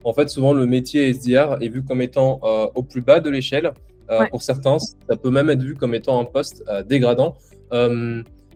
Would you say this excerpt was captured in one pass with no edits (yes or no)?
yes